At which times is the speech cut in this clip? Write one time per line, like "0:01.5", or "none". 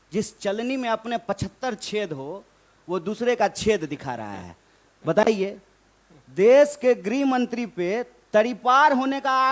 none